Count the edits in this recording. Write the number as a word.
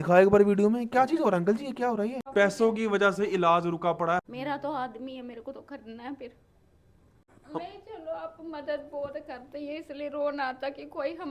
three